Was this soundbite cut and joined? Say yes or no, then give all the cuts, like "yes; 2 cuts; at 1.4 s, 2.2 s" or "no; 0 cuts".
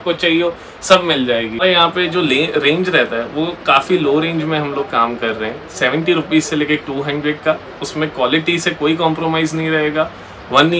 yes; 1 cut; at 1.6 s